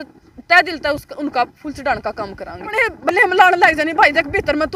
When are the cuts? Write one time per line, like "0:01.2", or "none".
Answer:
0:02.7